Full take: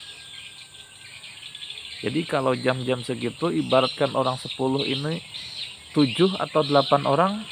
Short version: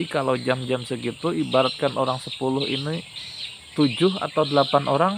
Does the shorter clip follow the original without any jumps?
yes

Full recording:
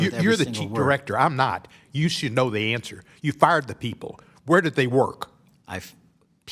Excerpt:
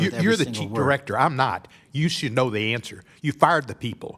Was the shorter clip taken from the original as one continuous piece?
yes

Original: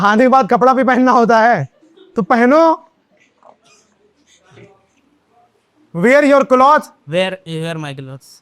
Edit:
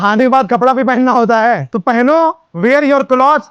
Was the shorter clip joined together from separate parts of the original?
yes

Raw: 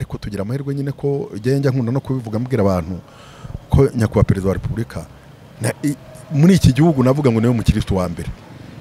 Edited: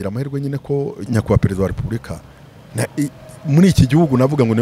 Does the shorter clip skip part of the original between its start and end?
yes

